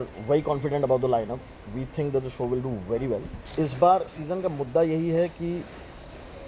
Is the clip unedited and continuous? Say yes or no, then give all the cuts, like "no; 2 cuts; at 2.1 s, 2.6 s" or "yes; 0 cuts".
no; 1 cut; at 3.4 s